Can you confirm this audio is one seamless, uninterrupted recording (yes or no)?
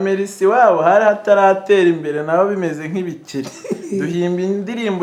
yes